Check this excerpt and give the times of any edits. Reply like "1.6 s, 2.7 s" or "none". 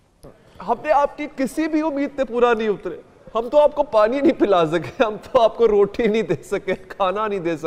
none